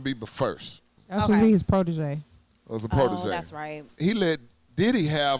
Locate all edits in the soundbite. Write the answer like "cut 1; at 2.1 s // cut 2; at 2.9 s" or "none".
cut 1; at 1.0 s // cut 2; at 3.9 s